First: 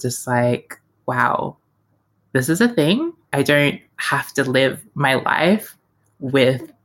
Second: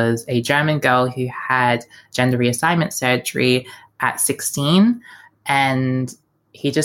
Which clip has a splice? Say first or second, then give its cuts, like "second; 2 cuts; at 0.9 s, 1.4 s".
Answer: first; 2 cuts; at 0.9 s, 3.3 s